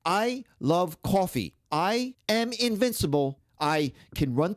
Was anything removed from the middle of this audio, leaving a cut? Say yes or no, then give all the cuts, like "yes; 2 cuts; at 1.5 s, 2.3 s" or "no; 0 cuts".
yes; 2 cuts; at 1.9 s, 3.4 s